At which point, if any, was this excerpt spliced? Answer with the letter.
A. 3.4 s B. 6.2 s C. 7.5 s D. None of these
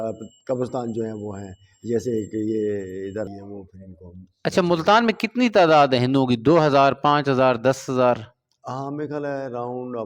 A